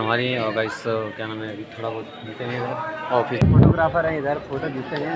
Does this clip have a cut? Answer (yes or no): yes